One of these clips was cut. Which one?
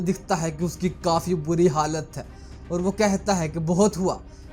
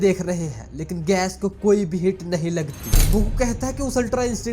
second; 1 cut; at 2.9 s

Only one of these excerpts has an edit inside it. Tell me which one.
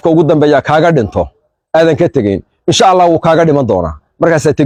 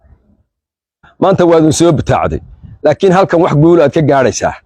second; 1 cut; at 1.1 s

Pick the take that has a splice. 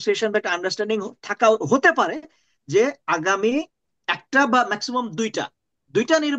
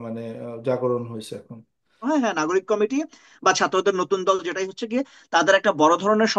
second; 1 cut; at 2.0 s

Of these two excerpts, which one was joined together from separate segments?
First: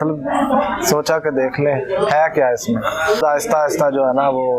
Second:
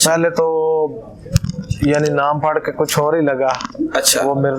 first; 1 cut; at 3.2 s

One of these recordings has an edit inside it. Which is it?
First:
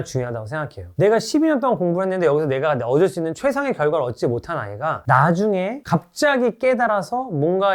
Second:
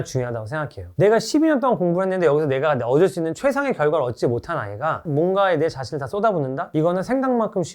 second; 1 cut; at 5.0 s

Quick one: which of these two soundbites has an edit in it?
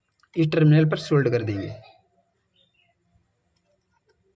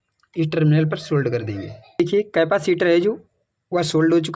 second; 1 cut; at 2.0 s

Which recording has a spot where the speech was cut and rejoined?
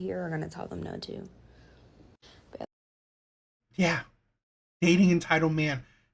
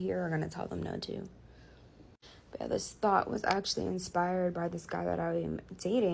second; 1 cut; at 2.7 s

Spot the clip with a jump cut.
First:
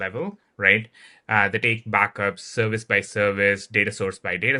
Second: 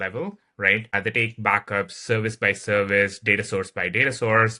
second; 1 cut; at 0.9 s

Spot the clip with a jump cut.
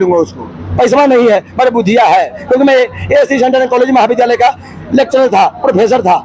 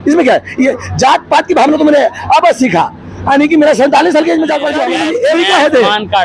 second; 1 cut; at 4.9 s

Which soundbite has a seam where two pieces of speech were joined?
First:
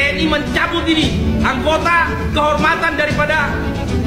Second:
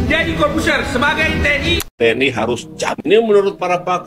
second; 1 cut; at 1.8 s

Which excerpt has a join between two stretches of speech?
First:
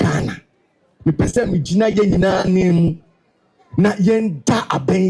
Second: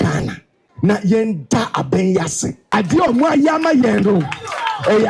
second; 2 cuts; at 0.9 s, 2.7 s

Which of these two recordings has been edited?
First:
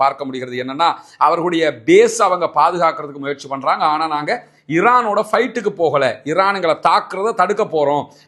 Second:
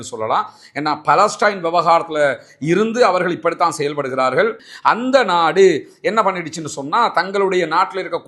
second; 1 cut; at 4.6 s

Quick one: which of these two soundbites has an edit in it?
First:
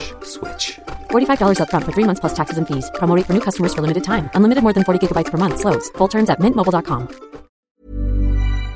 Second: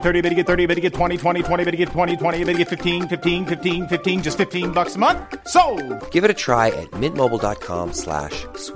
first; 1 cut; at 7.7 s

